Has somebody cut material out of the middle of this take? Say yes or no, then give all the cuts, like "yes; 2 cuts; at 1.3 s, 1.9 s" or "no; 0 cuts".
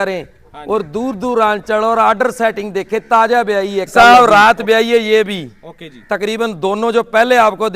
yes; 1 cut; at 3.9 s